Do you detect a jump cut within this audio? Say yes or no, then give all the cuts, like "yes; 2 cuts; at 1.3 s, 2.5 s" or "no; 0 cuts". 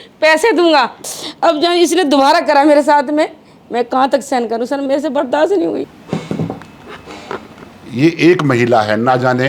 yes; 2 cuts; at 1.0 s, 5.9 s